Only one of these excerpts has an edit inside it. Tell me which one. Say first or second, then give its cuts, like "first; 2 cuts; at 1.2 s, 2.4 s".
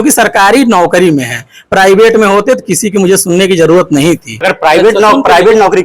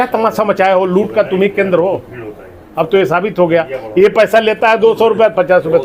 first; 1 cut; at 4.5 s